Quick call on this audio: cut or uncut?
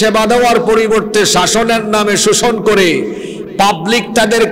uncut